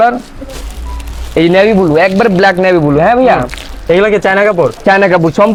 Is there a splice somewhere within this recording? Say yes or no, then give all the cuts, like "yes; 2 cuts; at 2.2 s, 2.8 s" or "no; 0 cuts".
no; 0 cuts